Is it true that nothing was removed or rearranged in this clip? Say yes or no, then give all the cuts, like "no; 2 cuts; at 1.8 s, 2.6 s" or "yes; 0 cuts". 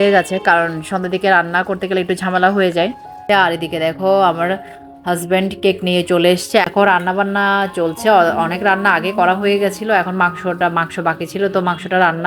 no; 2 cuts; at 3.2 s, 6.7 s